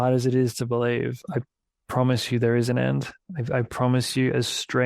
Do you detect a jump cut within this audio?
yes; 1 cut; at 1.2 s

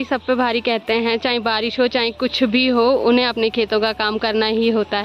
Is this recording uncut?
yes; 0 cuts

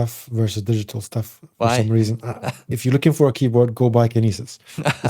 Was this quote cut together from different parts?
yes; 1 cut; at 2.6 s

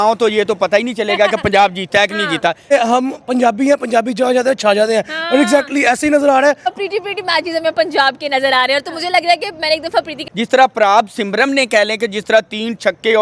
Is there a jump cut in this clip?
yes; 3 cuts; at 2.7 s, 6.8 s, 10.2 s

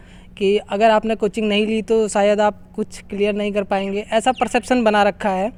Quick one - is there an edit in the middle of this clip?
no; 0 cuts

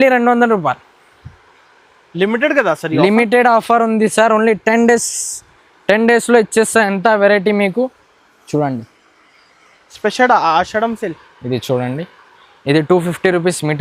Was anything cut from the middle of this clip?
no; 0 cuts

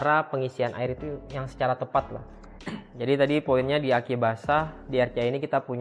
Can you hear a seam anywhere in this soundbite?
yes; 1 cut; at 2.6 s

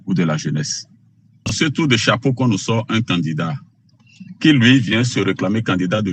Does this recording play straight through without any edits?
no; 1 cut; at 1.6 s

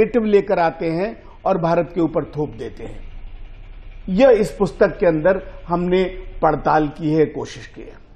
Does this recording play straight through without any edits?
yes; 0 cuts

